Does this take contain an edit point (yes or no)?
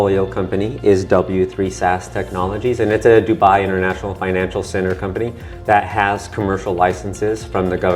no